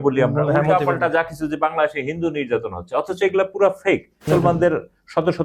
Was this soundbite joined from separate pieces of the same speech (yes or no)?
yes